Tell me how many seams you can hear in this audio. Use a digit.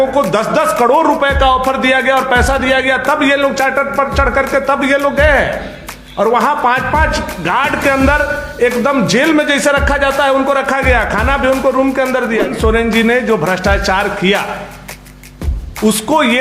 1